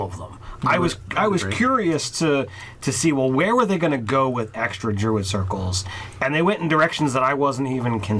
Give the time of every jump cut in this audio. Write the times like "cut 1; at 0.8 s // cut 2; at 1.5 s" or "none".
cut 1; at 2.4 s